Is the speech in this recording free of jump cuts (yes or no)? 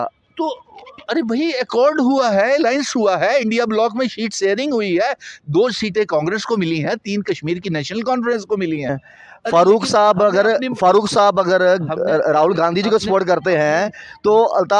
no